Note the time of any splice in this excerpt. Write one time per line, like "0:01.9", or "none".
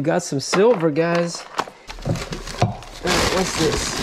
0:02.0